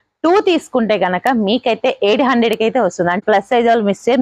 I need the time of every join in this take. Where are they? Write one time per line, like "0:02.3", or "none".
0:03.2